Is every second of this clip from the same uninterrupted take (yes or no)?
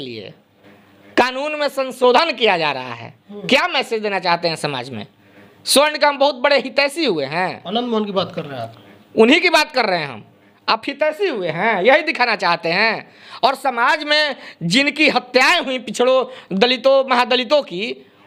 yes